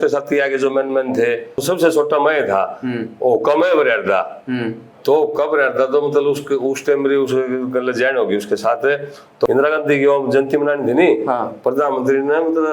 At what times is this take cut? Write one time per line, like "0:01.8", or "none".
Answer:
0:01.6
0:09.5